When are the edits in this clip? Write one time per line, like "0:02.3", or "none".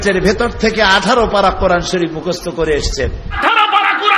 0:03.2